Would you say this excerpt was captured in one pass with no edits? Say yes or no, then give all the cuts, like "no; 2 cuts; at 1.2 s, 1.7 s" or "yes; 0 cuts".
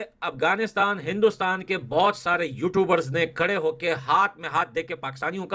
yes; 0 cuts